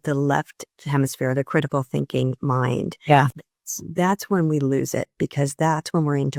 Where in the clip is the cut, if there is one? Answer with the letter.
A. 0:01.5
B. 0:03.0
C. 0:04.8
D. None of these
D